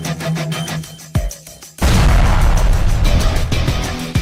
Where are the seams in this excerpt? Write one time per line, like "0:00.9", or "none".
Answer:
none